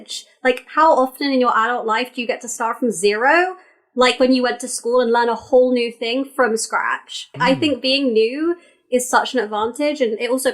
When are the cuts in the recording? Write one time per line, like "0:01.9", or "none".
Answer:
0:07.3